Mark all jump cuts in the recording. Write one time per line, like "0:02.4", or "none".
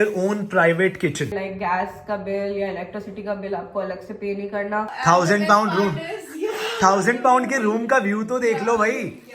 0:01.3
0:04.9